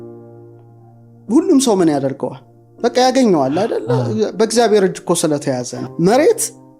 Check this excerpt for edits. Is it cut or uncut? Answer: cut